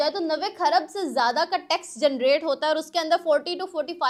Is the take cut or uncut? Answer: uncut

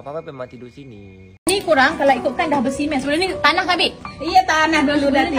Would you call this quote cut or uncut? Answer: cut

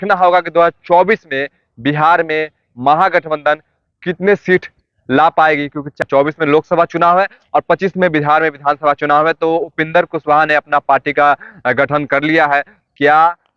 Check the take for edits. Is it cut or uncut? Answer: cut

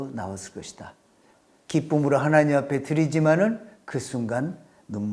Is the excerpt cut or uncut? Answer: cut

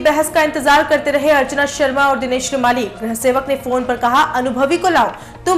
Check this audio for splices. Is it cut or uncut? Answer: uncut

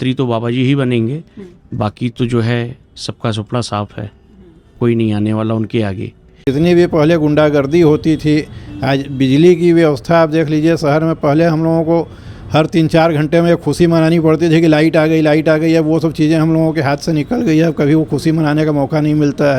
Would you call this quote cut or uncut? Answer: cut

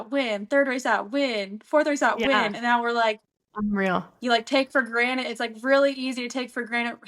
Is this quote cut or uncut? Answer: uncut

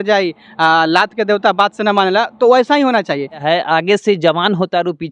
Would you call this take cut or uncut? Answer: cut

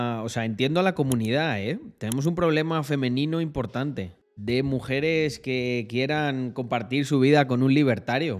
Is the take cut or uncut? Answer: uncut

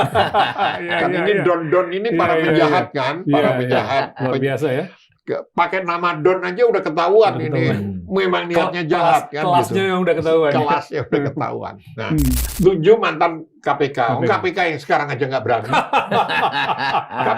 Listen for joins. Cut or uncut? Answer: cut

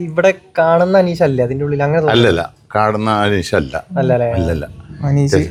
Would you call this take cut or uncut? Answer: uncut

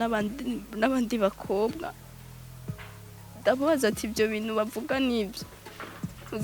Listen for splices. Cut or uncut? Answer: cut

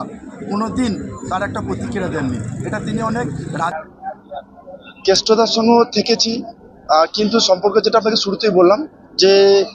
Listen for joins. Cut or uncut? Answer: cut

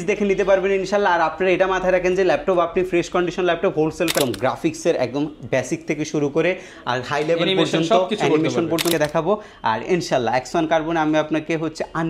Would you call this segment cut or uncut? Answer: cut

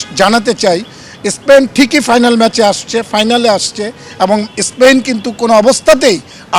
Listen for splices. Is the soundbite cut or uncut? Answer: uncut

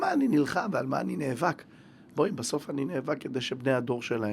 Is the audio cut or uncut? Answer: uncut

